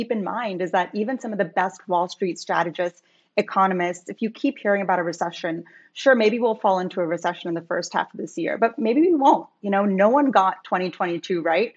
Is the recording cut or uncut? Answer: uncut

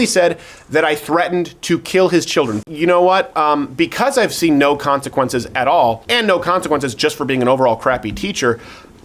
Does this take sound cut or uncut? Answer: cut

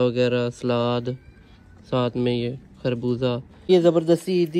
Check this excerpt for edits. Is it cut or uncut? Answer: cut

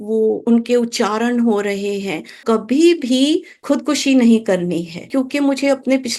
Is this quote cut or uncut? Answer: cut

